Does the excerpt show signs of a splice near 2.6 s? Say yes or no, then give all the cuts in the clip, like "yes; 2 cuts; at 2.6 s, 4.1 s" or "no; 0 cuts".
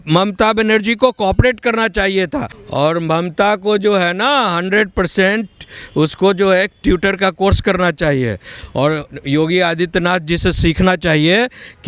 yes; 1 cut; at 2.6 s